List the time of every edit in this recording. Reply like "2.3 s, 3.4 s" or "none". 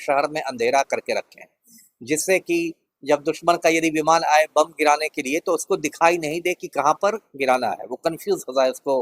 none